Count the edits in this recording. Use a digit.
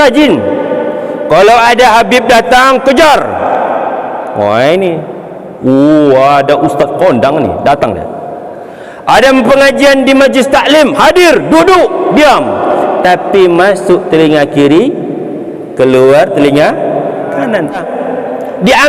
1